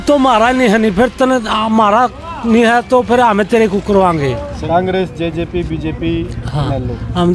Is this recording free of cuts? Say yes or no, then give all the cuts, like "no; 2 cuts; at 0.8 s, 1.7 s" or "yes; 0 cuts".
no; 1 cut; at 4.5 s